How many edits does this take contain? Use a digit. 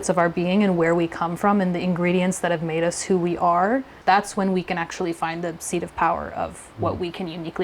1